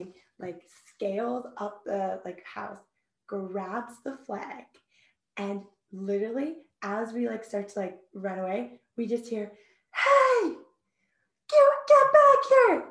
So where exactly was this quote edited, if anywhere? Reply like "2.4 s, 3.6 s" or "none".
none